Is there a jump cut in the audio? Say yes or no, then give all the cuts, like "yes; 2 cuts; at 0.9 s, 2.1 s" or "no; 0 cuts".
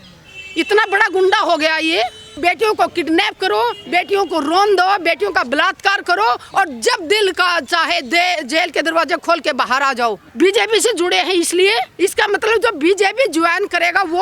yes; 3 cuts; at 2.4 s, 10.2 s, 11.9 s